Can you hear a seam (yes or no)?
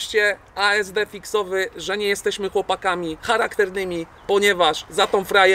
no